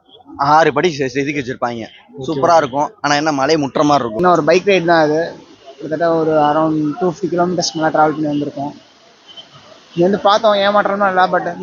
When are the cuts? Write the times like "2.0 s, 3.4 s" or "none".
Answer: 4.2 s